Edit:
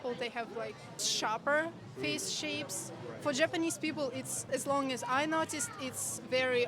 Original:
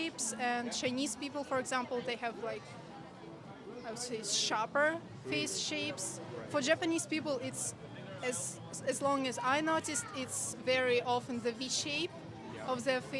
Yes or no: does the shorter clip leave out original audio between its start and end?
yes